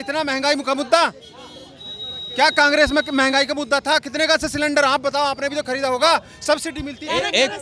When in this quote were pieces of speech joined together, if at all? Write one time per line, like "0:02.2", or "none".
none